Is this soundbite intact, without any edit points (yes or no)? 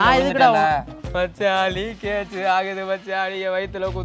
no